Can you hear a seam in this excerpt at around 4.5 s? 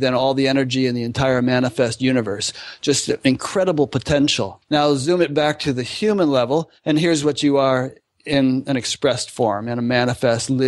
yes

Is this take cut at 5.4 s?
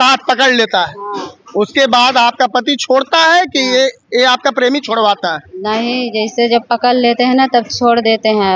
no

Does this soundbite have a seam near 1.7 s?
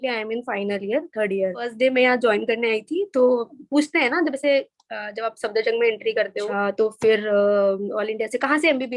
yes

